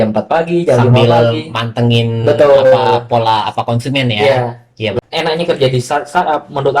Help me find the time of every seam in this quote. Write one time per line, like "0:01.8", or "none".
0:05.0